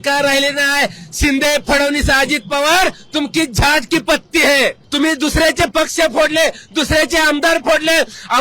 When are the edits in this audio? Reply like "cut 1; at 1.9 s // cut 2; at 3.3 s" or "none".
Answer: cut 1; at 4.8 s